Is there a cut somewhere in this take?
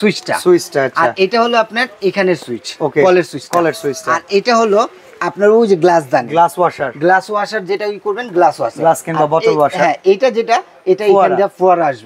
no; 0 cuts

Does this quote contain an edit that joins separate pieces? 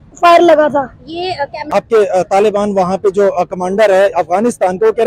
yes; 1 cut; at 1.5 s

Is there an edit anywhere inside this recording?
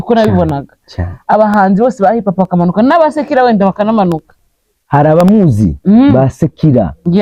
no; 0 cuts

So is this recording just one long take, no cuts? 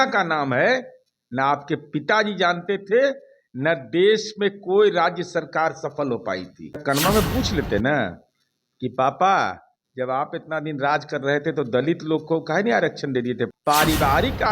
no; 2 cuts; at 6.8 s, 13.6 s

